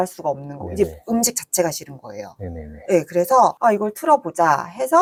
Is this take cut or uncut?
uncut